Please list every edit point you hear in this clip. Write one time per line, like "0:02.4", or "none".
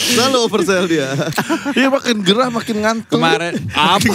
0:01.3